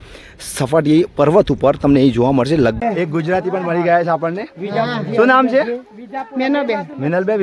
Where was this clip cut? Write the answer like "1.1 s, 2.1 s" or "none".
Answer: 2.8 s